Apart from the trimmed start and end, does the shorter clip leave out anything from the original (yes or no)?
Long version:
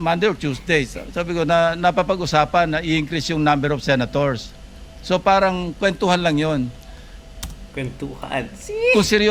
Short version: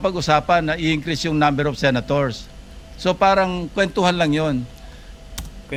no